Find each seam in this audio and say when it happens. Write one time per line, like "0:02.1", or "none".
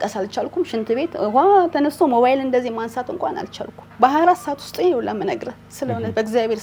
none